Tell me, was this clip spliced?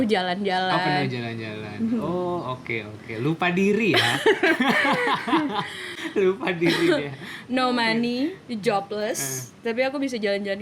no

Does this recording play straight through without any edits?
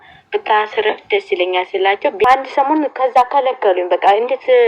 no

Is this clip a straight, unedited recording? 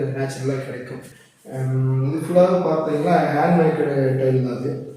no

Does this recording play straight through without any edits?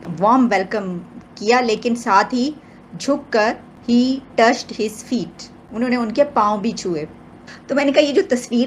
yes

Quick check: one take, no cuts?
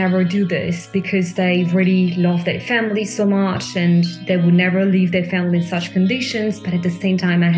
yes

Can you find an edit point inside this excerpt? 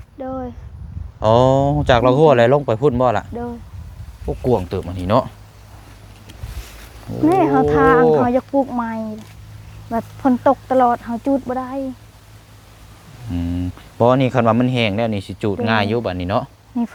no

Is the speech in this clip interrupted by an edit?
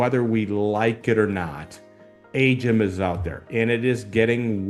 no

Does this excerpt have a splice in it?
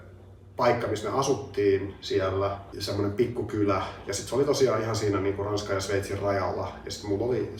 no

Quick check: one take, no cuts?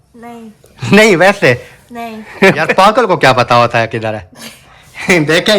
no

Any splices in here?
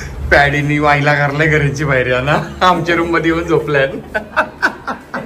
no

